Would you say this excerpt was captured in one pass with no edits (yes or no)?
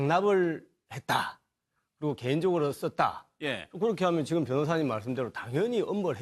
no